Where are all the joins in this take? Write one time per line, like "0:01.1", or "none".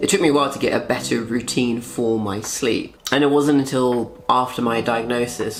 none